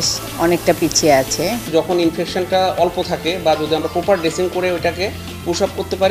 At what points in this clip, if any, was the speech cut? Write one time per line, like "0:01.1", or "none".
0:01.6